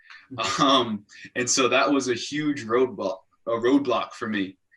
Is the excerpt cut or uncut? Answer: uncut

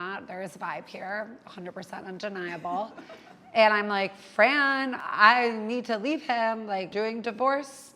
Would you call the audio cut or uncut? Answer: cut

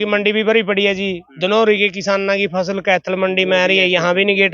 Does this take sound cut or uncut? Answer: uncut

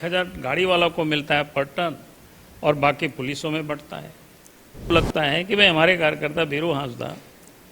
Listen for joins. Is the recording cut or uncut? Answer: cut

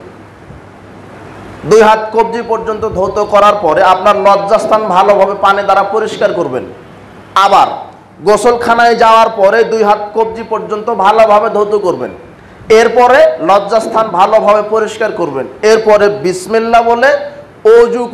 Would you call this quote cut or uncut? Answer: uncut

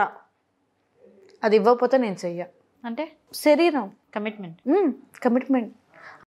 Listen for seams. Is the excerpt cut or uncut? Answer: uncut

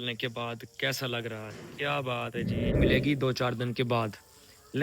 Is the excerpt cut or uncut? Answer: cut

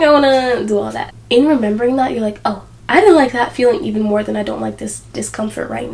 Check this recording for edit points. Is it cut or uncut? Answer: cut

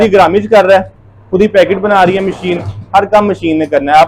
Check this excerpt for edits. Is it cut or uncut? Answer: uncut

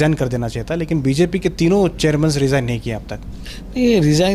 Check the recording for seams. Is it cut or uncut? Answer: uncut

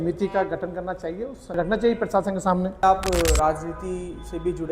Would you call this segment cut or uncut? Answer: cut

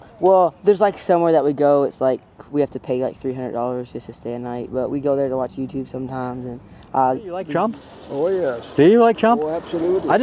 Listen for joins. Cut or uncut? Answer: cut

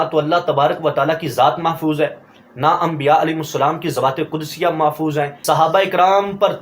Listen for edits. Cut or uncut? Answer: cut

